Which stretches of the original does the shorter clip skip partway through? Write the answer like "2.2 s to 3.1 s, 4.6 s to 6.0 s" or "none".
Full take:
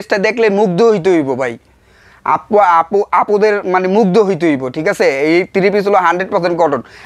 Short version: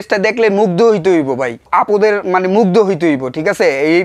1.7 s to 3.1 s